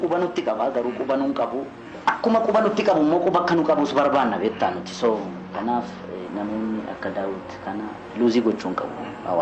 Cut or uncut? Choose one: cut